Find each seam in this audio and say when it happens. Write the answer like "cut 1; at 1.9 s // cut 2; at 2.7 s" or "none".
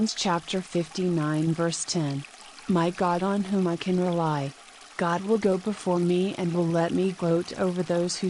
none